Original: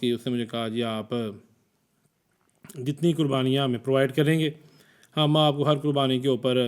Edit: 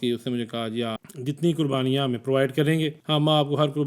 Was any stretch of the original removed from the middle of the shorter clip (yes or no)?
yes